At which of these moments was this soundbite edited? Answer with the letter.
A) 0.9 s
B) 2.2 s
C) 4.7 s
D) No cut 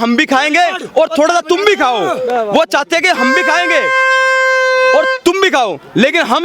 D